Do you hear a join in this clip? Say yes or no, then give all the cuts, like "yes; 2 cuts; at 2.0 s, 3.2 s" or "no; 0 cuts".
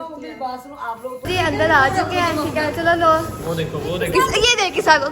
yes; 1 cut; at 1.1 s